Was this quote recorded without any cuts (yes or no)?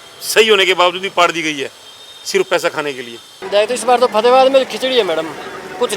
no